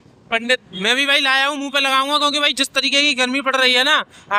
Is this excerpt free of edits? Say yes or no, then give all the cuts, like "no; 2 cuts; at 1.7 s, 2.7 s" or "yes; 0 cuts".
yes; 0 cuts